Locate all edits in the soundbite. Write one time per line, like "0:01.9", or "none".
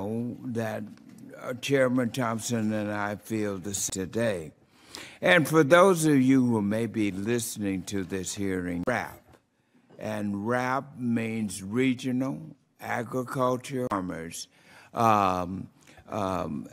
none